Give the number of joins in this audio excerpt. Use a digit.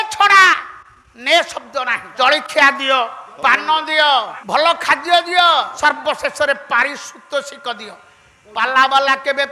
4